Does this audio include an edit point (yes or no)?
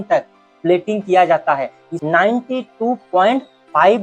yes